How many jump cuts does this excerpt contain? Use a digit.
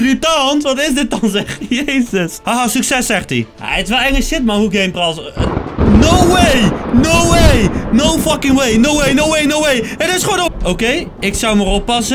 2